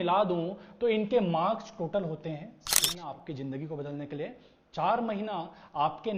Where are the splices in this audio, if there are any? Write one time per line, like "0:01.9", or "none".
0:03.0